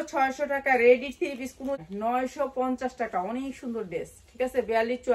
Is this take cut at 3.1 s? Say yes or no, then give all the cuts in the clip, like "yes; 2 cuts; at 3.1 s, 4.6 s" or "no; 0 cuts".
no; 1 cut; at 1.8 s